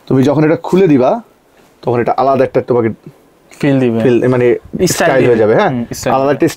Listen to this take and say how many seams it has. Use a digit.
0